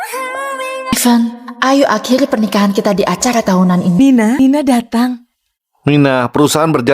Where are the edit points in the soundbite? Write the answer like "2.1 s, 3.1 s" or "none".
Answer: 0.9 s, 4.2 s